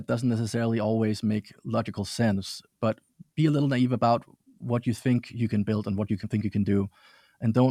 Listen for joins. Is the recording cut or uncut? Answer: uncut